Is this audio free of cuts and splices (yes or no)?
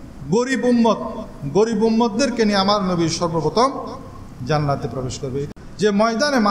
no